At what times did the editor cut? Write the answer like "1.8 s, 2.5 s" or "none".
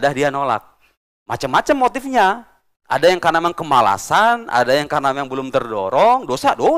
none

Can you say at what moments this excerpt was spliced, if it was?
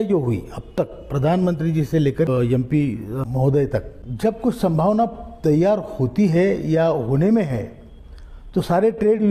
2.3 s, 3.2 s, 4.0 s

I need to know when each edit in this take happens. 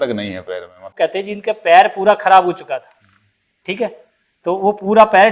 1.0 s

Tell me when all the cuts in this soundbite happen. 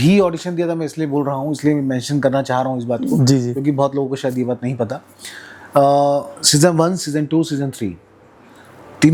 none

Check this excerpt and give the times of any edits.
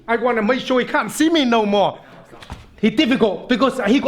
2.1 s

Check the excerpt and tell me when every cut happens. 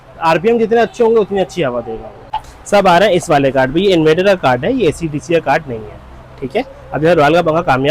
none

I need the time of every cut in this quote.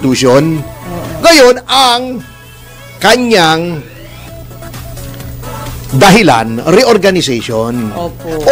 none

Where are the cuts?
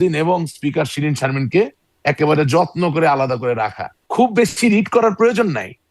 3.9 s

